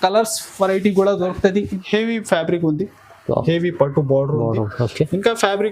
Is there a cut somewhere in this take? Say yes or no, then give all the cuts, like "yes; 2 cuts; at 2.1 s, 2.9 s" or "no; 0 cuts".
yes; 1 cut; at 1.7 s